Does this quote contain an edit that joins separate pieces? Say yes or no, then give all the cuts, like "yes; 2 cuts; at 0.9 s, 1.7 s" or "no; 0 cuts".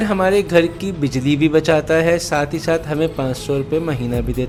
no; 0 cuts